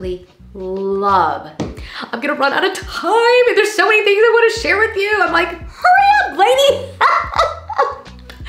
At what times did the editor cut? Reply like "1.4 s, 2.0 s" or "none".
1.5 s